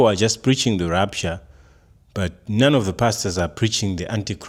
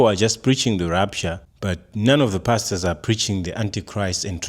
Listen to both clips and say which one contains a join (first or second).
second